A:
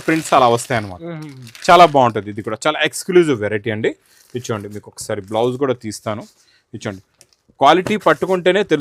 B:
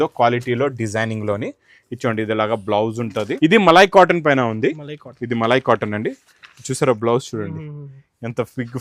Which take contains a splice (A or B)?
B